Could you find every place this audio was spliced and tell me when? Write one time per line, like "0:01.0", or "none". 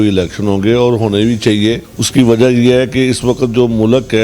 0:01.9